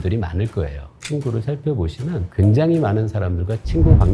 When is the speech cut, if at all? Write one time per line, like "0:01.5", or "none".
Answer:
0:01.0